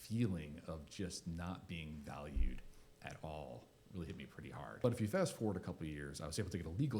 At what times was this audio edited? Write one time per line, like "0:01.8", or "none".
0:04.8